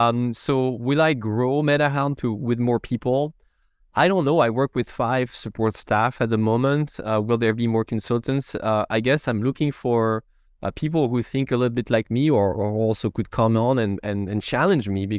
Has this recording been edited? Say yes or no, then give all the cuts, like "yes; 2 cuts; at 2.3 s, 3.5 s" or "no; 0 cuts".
no; 0 cuts